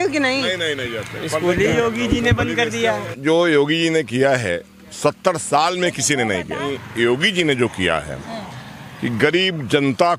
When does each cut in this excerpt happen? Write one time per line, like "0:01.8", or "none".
0:03.1
0:06.6